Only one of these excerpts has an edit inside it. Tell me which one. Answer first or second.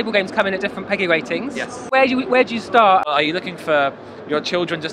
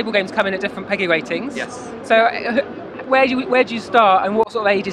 first